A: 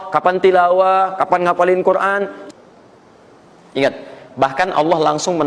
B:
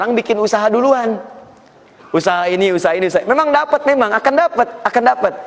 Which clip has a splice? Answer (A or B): A